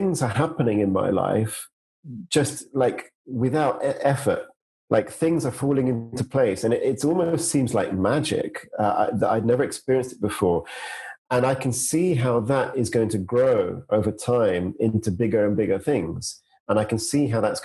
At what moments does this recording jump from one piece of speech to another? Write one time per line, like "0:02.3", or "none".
none